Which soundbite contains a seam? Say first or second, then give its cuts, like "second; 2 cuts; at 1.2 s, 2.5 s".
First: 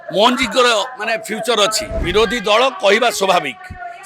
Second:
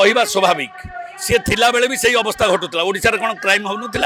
first; 1 cut; at 1.9 s